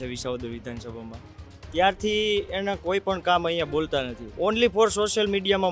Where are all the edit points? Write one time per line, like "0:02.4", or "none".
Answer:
0:04.2